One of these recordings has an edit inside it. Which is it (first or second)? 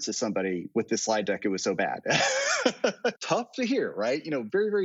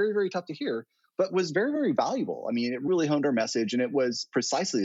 first